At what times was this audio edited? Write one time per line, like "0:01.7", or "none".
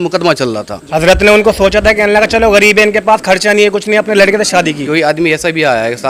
0:00.8
0:04.8

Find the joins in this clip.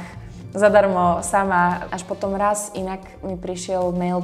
0:01.9

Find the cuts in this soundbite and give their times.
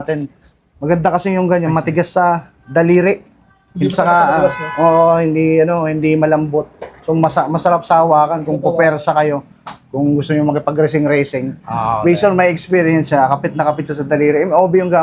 none

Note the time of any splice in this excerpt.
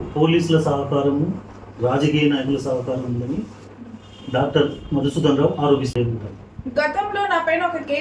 0:05.9

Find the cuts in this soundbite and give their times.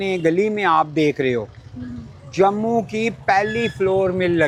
none

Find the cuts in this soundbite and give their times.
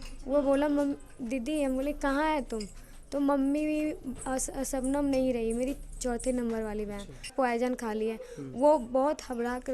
0:07.3

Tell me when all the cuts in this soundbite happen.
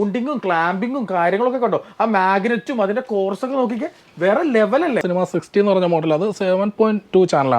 0:05.0

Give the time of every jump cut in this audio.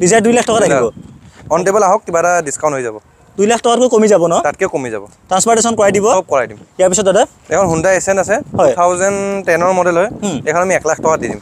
0:06.6

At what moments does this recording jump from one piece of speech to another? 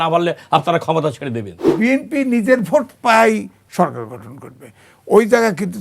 0:01.7

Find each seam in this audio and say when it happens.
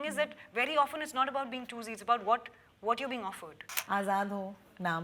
0:03.7

